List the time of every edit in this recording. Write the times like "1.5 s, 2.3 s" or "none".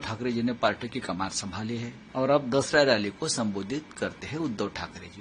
2.0 s